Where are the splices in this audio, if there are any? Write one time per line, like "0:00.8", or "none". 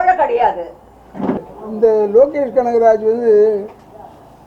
0:01.4